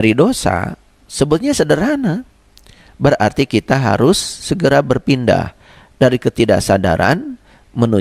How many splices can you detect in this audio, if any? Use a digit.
0